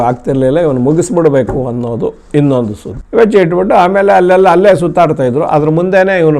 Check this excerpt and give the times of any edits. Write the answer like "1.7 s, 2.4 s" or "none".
2.9 s